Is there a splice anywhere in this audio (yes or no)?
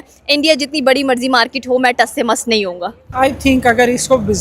yes